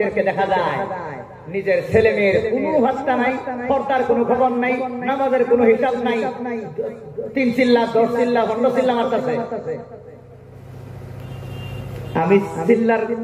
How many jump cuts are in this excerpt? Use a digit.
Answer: 0